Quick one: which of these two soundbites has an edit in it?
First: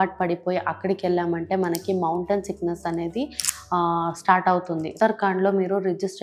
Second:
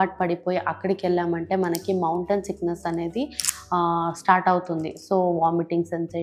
first; 1 cut; at 4.9 s

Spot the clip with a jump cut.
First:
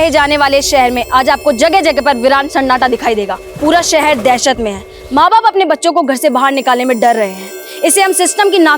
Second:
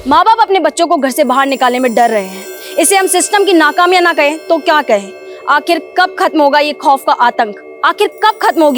first; 1 cut; at 3.4 s

